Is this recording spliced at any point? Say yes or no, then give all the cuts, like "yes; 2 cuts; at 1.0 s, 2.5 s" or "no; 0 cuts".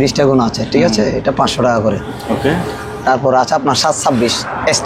no; 0 cuts